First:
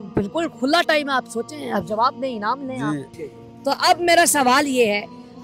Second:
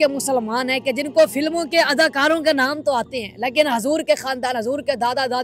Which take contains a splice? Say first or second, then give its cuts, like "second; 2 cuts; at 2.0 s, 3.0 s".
first; 1 cut; at 3.1 s